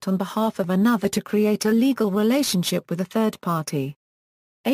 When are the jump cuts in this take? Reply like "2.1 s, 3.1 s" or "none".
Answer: none